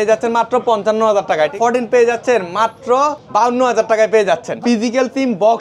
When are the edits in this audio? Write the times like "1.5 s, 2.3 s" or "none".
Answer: 1.5 s, 3.2 s, 4.5 s